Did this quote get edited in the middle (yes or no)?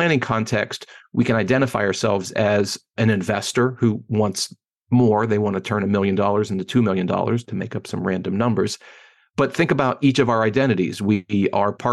no